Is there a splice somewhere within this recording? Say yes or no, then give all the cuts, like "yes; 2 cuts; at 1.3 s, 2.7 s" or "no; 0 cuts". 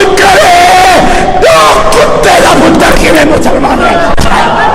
yes; 1 cut; at 1.4 s